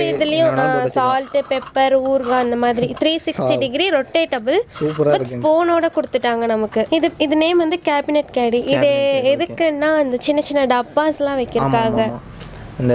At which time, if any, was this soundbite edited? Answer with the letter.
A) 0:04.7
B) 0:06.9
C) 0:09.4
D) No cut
B